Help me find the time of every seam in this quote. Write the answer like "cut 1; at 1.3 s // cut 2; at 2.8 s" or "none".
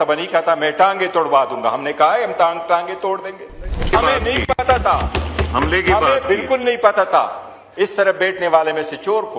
cut 1; at 3.9 s